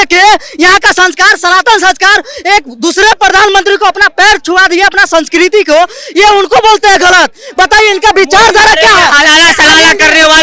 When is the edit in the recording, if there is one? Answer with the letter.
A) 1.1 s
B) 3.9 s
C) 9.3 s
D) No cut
D